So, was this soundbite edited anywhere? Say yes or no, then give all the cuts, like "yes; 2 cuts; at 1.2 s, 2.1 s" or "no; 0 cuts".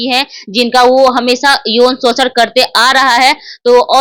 no; 0 cuts